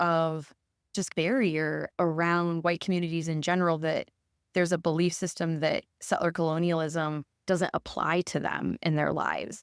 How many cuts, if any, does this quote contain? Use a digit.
1